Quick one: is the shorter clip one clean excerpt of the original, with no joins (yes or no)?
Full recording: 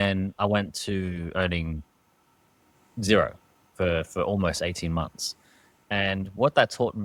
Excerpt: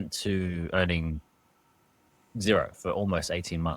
no